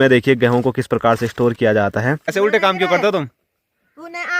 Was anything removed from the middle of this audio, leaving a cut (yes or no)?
yes